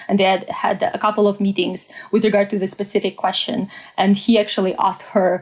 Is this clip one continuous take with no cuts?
yes; 0 cuts

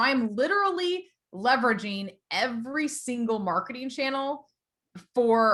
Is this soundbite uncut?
yes; 0 cuts

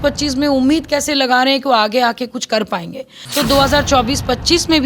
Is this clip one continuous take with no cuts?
no; 1 cut; at 3.2 s

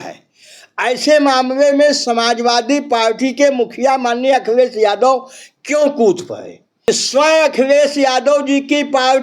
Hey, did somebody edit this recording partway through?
yes; 1 cut; at 6.9 s

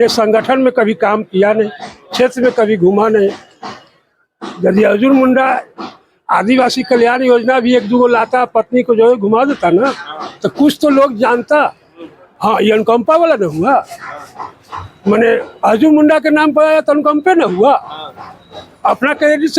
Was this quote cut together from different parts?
yes; 1 cut; at 12.2 s

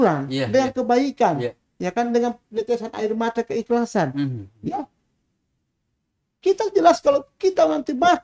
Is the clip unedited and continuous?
yes; 0 cuts

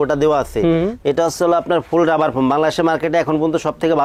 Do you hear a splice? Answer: no; 0 cuts

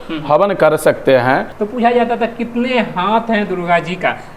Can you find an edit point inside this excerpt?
yes; 1 cut; at 1.5 s

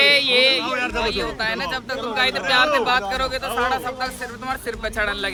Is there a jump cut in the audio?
no; 0 cuts

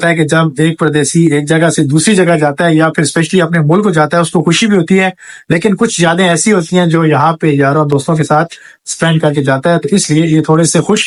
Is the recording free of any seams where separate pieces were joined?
yes; 0 cuts

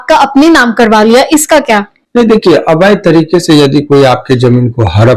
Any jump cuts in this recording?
no; 0 cuts

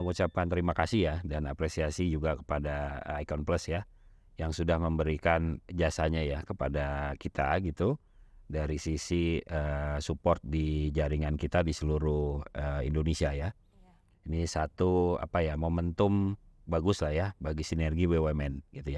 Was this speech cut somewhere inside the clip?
no; 0 cuts

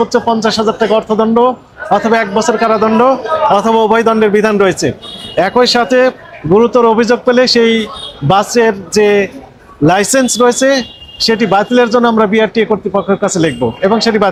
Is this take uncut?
yes; 0 cuts

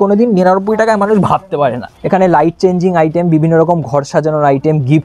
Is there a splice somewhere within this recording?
yes; 1 cut; at 1.9 s

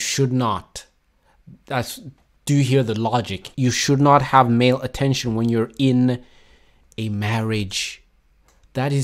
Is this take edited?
yes; 1 cut; at 3.4 s

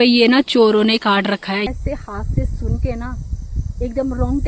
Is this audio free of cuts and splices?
no; 1 cut; at 1.7 s

